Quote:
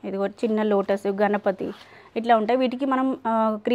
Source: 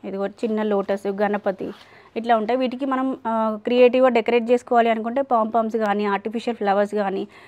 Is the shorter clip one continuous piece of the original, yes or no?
yes